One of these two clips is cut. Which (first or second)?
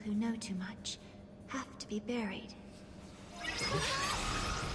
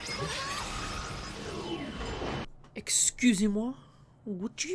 second